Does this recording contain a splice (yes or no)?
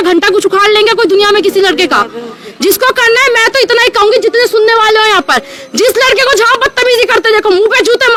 no